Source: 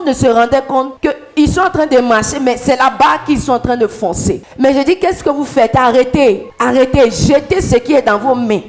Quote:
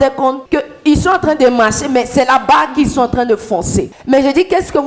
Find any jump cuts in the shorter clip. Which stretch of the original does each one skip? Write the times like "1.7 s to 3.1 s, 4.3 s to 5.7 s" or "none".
none